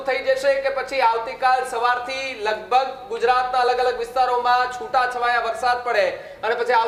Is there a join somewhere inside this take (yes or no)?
no